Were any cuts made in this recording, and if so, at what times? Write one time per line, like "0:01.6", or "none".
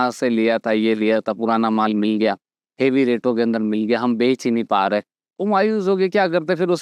none